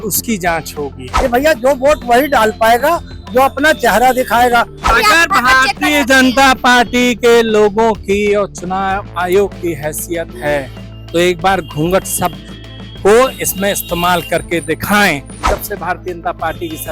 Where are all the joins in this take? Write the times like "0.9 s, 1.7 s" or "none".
1.0 s, 4.8 s, 15.5 s